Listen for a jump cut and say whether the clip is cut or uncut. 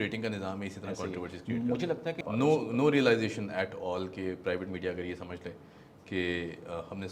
cut